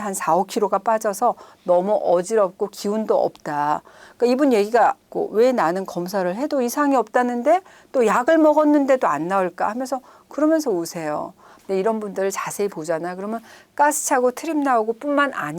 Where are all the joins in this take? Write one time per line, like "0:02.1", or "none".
0:11.5

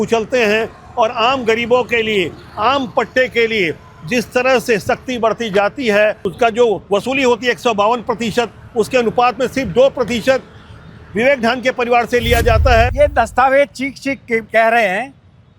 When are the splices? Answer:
0:12.9
0:14.5

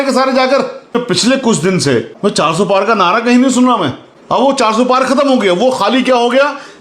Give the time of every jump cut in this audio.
0:01.0
0:02.1

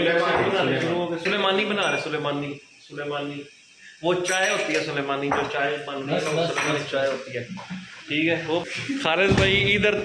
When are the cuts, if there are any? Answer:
0:08.6

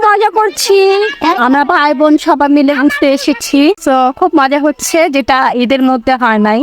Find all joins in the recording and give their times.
0:03.8

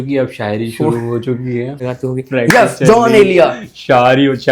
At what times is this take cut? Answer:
0:01.8

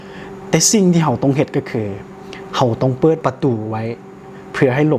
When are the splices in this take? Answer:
0:03.2

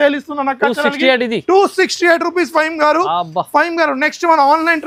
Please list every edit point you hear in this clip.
none

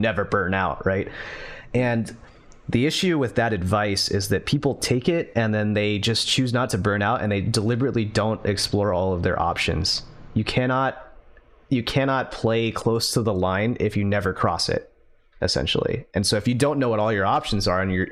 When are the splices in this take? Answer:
none

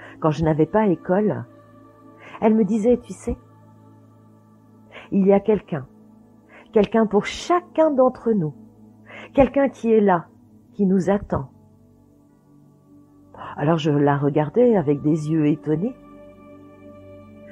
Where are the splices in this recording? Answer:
0:11.7
0:13.3

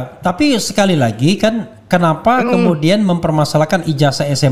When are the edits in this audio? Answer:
none

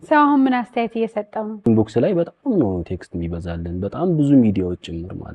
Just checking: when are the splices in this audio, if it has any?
0:01.7

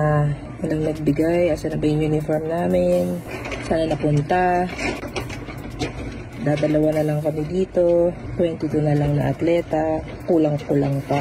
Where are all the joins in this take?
none

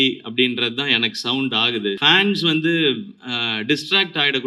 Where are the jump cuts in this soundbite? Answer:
0:02.0

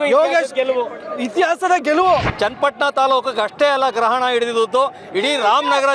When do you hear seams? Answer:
0:02.3

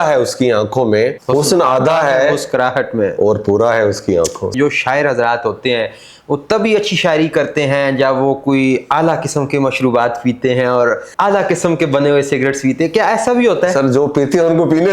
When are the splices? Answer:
0:01.2
0:04.6
0:11.1

